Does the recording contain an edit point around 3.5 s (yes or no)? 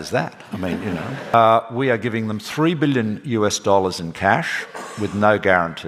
no